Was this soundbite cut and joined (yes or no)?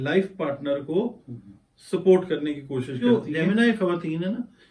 yes